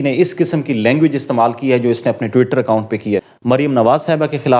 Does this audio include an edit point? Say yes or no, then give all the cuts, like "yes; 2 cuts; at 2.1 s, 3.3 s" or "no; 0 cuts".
yes; 1 cut; at 3.3 s